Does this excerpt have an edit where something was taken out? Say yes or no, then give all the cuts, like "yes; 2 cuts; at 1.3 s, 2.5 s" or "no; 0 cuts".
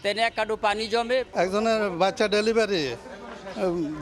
yes; 1 cut; at 1.3 s